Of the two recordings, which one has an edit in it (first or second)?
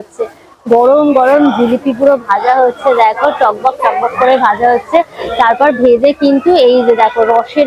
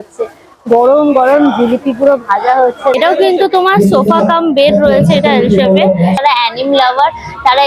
second